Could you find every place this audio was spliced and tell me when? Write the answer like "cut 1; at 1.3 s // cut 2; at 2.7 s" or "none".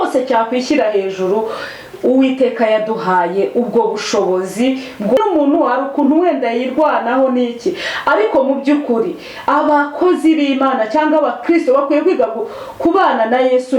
cut 1; at 5.2 s